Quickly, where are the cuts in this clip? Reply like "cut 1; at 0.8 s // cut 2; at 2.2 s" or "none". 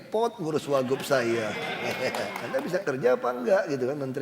cut 1; at 2.4 s